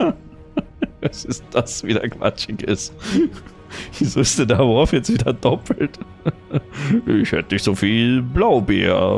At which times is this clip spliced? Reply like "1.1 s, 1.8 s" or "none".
none